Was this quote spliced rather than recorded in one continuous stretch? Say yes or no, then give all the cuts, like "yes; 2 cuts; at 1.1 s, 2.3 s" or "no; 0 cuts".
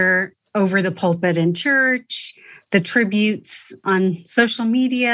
yes; 1 cut; at 3.8 s